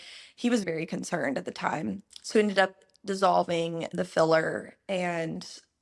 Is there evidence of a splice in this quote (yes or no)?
no